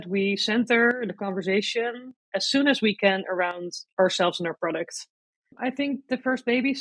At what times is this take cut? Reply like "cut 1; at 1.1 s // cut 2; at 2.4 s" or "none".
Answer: cut 1; at 5.6 s